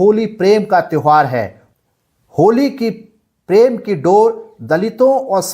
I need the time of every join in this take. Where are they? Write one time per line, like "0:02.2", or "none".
0:01.6